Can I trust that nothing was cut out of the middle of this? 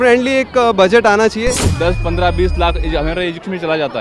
no; 1 cut; at 1.6 s

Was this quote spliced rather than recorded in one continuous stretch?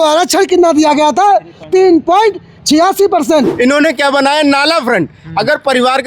yes; 1 cut; at 3.5 s

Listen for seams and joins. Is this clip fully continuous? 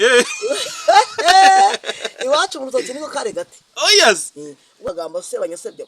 no; 1 cut; at 4.9 s

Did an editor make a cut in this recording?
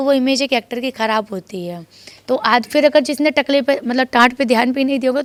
no; 0 cuts

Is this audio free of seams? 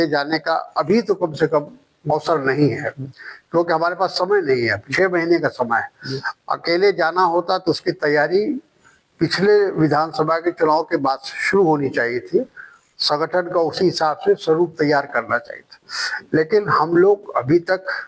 yes; 0 cuts

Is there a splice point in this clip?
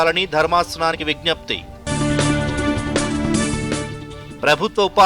yes; 1 cut; at 1.0 s

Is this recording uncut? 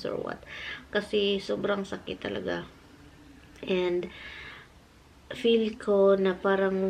yes; 0 cuts

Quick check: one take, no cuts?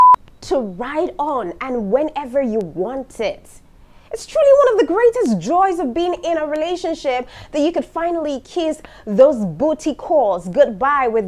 yes; 0 cuts

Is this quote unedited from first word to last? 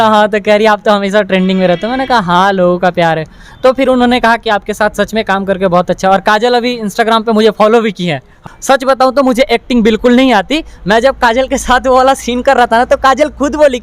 no; 1 cut; at 8.3 s

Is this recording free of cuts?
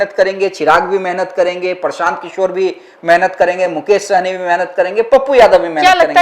yes; 0 cuts

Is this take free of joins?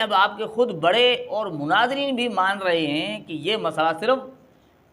yes; 0 cuts

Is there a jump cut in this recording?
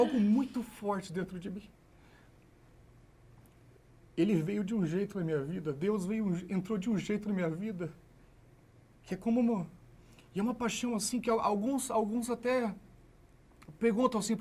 no; 0 cuts

